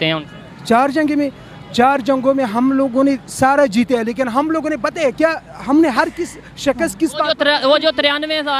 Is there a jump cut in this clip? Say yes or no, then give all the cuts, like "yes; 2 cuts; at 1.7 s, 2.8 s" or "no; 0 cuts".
no; 0 cuts